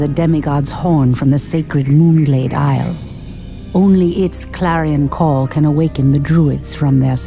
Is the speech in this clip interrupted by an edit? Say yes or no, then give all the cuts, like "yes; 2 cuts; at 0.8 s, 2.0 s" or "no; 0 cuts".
no; 0 cuts